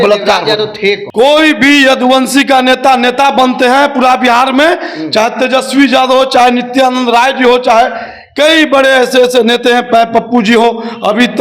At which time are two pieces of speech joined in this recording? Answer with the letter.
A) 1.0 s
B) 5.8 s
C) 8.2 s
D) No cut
A